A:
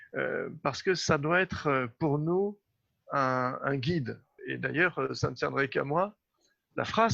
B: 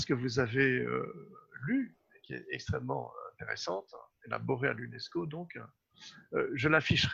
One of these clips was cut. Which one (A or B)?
A